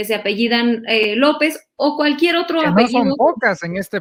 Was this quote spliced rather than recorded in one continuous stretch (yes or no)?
no